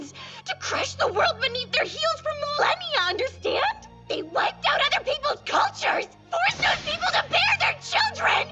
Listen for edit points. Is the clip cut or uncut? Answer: uncut